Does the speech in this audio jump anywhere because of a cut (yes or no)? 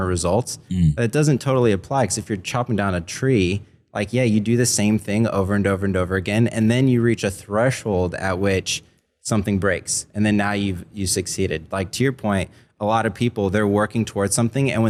no